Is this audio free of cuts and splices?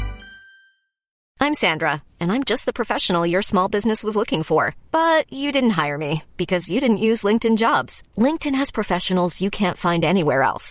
no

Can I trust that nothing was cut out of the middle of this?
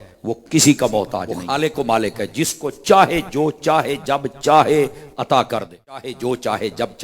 no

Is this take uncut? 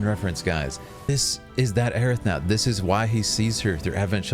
no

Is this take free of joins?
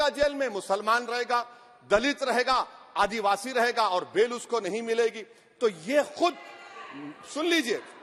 yes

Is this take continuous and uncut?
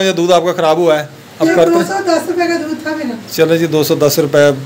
no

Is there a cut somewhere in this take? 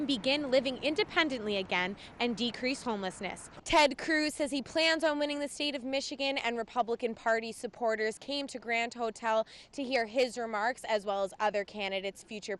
yes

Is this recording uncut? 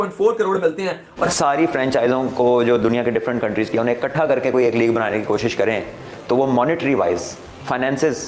no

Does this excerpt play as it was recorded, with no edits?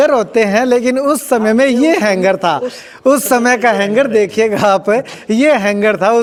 yes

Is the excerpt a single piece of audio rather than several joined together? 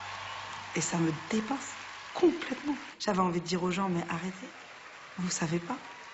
no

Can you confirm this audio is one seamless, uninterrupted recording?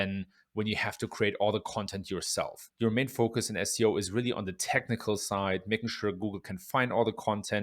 no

